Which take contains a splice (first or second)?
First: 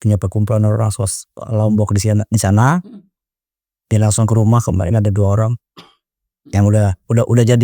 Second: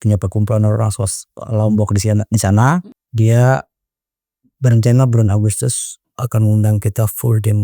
second